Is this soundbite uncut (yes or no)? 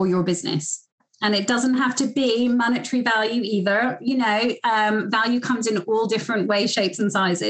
no